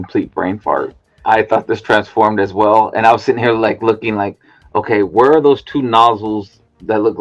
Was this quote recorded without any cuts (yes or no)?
no